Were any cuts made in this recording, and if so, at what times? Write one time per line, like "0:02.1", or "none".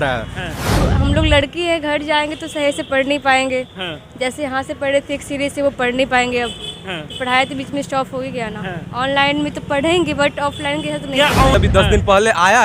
0:00.8
0:11.5